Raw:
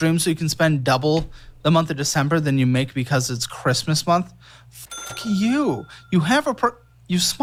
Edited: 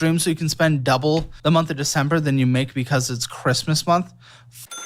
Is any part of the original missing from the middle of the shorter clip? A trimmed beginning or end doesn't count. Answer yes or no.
yes